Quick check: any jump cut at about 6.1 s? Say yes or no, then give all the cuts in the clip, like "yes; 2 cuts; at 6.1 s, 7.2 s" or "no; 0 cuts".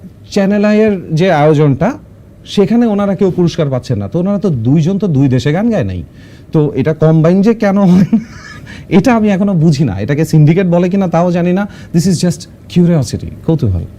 no; 0 cuts